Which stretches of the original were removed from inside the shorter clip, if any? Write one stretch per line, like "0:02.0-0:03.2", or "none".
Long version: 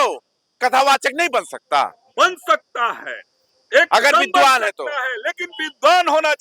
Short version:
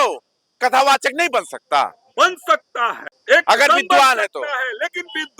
0:03.1-0:03.5